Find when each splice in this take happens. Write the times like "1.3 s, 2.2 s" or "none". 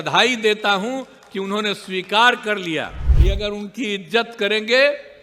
3.0 s